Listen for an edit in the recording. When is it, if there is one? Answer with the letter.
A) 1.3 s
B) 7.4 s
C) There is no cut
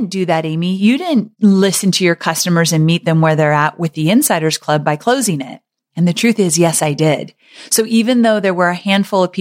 A